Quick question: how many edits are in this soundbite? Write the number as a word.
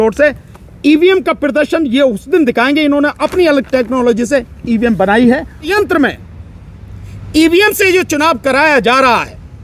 one